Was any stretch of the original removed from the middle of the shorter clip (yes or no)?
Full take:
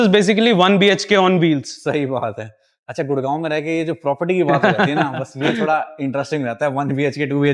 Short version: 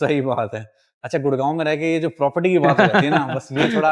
no